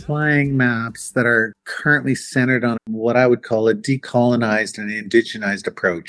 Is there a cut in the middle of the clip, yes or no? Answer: no